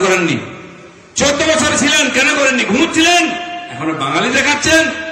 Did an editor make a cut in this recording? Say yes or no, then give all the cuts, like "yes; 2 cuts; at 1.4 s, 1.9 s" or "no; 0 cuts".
no; 0 cuts